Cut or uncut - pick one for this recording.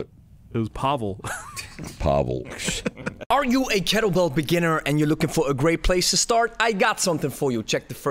cut